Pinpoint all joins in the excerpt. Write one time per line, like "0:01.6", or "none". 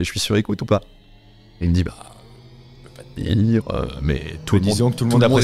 none